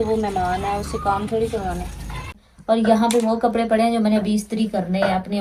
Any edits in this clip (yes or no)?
yes